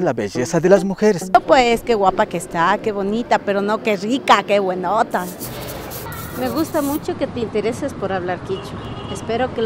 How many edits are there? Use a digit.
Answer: 2